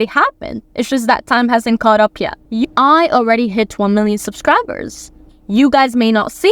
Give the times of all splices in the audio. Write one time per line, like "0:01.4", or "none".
0:02.6